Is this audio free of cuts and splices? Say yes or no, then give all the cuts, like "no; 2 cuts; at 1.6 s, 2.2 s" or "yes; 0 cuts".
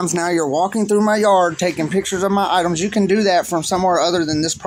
yes; 0 cuts